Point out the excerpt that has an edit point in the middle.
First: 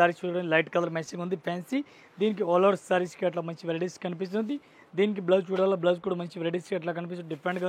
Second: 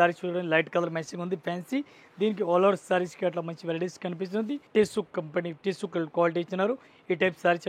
second; 1 cut; at 4.6 s

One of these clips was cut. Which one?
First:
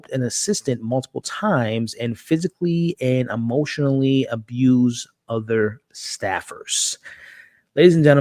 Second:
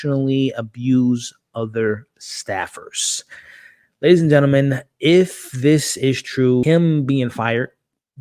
second; 1 cut; at 6.6 s

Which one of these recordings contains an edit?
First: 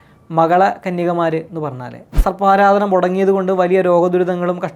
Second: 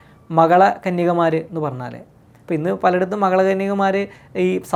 first; 1 cut; at 2.2 s

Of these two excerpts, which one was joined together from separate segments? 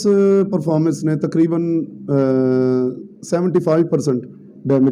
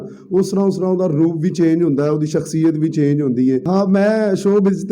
second; 1 cut; at 3.6 s

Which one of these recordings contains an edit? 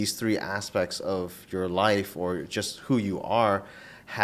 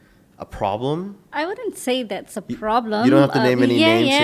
second; 1 cut; at 1.2 s

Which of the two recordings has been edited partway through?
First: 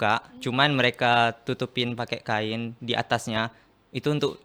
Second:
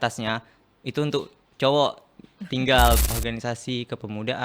second; 1 cut; at 3.0 s

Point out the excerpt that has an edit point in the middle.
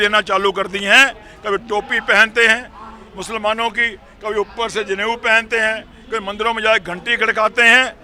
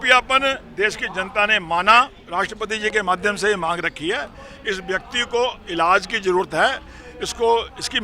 second; 1 cut; at 2.2 s

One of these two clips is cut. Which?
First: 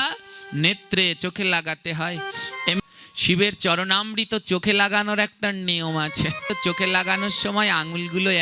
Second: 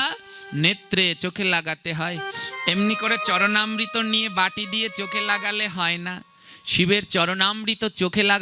first; 2 cuts; at 2.8 s, 6.5 s

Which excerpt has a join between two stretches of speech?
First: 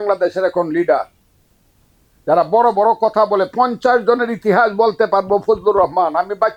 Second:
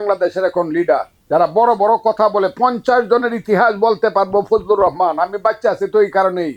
second; 1 cut; at 1.1 s

